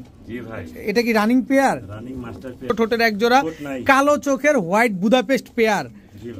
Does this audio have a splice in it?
yes; 1 cut; at 2.7 s

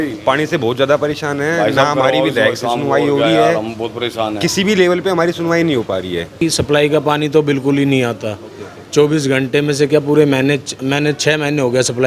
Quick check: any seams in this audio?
yes; 1 cut; at 6.4 s

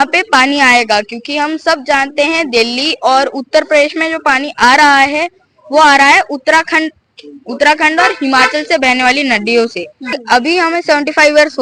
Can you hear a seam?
yes; 1 cut; at 10.2 s

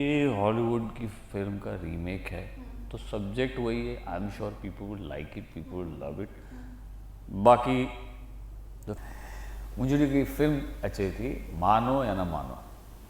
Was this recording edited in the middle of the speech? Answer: yes; 1 cut; at 9.0 s

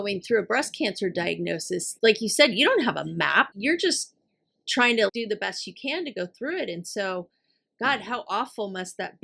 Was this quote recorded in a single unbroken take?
no; 3 cuts; at 1.9 s, 3.5 s, 5.1 s

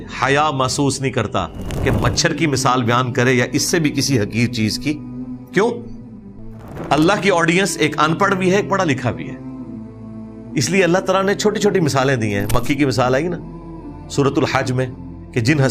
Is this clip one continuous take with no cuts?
yes; 0 cuts

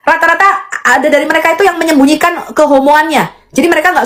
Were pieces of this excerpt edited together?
no; 0 cuts

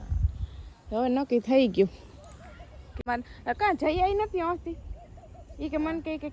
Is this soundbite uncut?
no; 1 cut; at 3.0 s

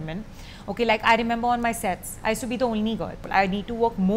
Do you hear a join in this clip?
yes; 1 cut; at 3.3 s

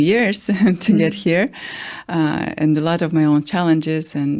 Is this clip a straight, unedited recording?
yes; 0 cuts

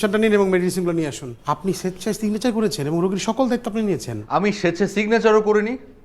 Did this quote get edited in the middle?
yes; 2 cuts; at 1.3 s, 4.1 s

